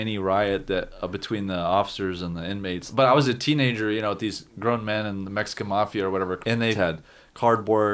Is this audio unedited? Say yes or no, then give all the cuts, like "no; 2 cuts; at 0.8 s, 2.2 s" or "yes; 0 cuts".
no; 2 cuts; at 2.9 s, 6.6 s